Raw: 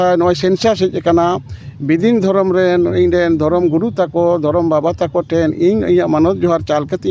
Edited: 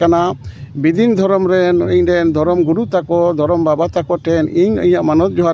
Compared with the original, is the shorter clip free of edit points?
yes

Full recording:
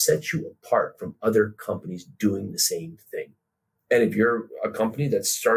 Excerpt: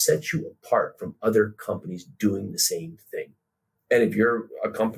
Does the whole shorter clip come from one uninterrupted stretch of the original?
yes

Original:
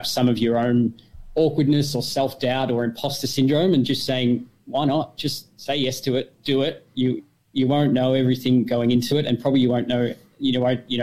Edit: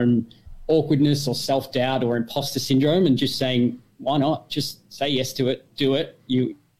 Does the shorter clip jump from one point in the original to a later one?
no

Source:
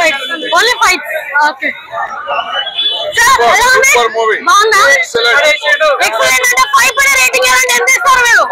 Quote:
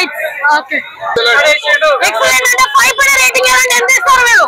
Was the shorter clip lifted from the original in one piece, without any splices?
no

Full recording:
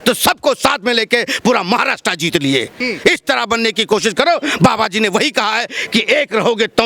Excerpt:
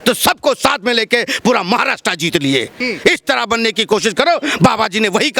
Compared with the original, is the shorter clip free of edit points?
yes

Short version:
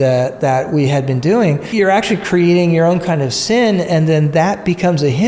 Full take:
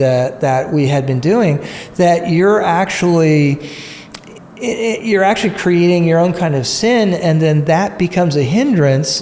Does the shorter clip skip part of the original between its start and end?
yes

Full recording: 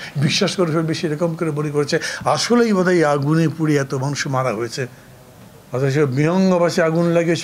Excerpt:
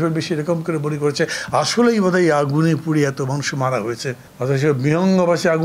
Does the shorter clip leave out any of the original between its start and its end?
yes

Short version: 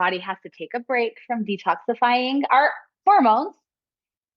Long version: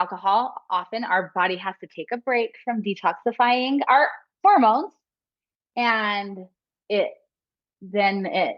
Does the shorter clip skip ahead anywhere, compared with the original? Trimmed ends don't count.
no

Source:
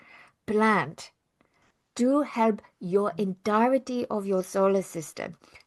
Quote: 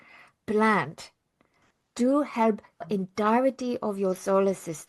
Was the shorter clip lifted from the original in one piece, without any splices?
no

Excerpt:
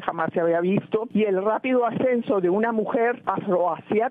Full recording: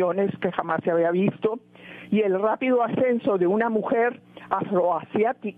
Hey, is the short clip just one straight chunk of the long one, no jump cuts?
no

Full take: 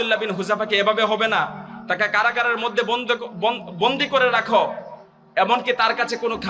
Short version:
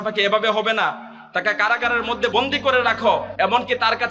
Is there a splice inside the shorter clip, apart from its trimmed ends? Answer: yes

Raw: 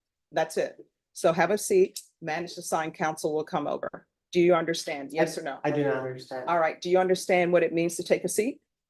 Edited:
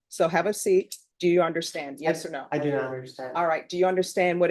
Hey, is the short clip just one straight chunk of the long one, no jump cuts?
no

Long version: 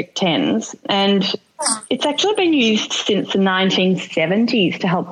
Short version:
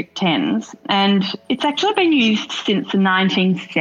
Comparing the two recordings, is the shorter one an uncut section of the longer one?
no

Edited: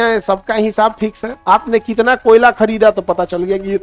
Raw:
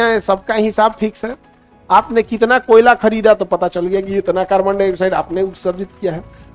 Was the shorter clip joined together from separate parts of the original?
yes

